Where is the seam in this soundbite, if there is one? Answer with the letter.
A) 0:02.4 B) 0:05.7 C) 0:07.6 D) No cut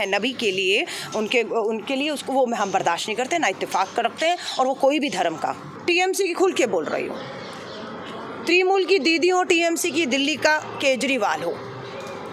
B